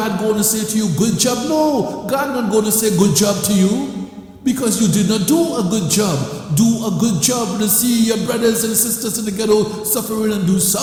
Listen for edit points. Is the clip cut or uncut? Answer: uncut